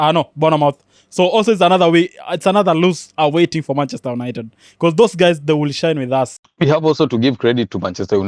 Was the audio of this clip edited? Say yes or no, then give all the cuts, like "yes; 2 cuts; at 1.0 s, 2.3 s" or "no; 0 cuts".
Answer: yes; 1 cut; at 6.4 s